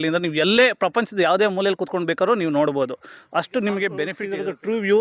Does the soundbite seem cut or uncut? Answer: cut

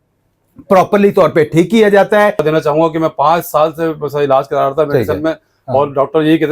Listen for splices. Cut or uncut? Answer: cut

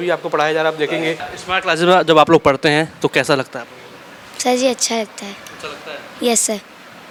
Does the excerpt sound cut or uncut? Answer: uncut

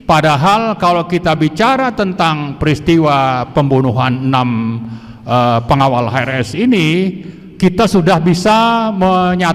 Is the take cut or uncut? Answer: uncut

